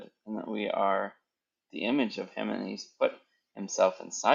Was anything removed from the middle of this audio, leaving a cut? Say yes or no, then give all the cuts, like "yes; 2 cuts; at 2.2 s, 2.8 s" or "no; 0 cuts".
no; 0 cuts